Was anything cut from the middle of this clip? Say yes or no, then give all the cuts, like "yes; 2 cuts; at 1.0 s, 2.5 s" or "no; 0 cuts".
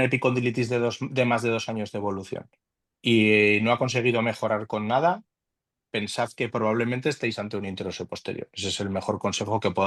no; 0 cuts